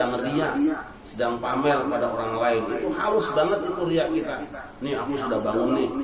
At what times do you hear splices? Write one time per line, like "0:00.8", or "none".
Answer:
none